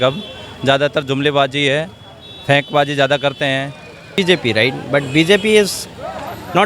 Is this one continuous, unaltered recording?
no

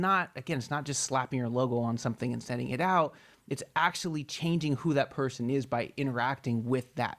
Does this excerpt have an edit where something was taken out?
no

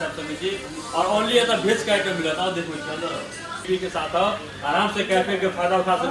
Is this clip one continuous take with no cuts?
no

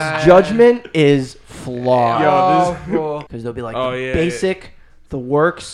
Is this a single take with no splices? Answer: no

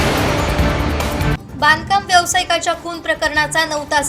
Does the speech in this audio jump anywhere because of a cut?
yes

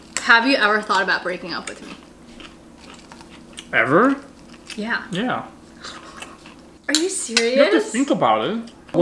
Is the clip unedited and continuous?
yes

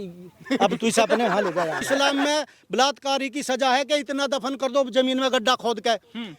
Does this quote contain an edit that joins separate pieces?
yes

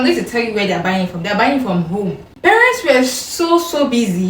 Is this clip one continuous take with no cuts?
no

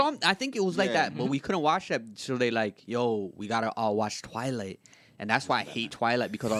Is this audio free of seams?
yes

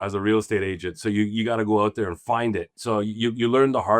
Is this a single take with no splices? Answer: no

